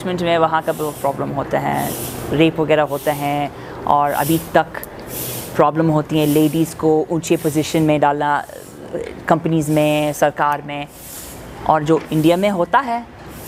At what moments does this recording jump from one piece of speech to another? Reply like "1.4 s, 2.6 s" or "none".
none